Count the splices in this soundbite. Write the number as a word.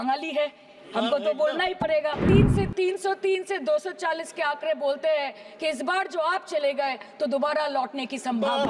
one